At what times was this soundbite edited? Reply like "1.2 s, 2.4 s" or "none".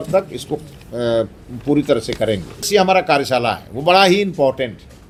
none